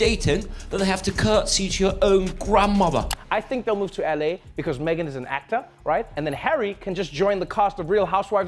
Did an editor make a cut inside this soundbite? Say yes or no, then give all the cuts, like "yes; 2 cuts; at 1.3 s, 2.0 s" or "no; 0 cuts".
yes; 1 cut; at 3.1 s